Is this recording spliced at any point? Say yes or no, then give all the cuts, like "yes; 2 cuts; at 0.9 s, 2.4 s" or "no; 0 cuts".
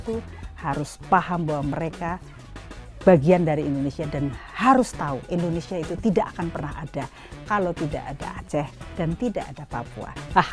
no; 0 cuts